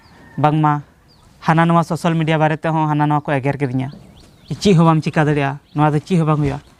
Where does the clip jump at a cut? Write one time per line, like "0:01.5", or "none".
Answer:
0:04.6